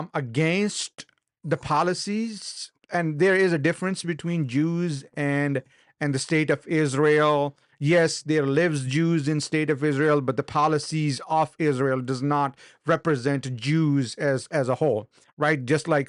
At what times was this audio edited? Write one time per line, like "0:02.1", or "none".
none